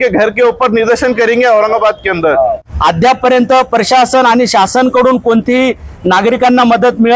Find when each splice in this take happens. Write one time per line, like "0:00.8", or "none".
0:02.7